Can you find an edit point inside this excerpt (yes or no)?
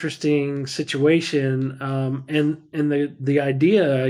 no